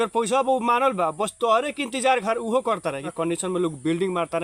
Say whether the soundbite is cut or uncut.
cut